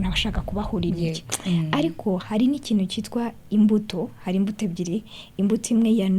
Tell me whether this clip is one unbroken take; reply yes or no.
yes